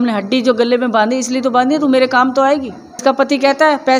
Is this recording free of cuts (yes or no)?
no